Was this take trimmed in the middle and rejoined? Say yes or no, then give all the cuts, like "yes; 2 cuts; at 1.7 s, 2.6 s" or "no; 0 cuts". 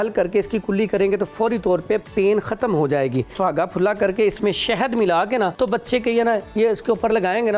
yes; 2 cuts; at 3.3 s, 5.5 s